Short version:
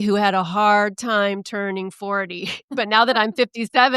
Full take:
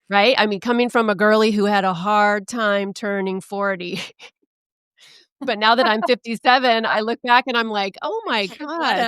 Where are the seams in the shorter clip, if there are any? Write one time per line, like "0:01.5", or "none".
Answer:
0:02.6